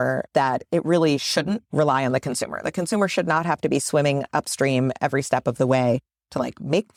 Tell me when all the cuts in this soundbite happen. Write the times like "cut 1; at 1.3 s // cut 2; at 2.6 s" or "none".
none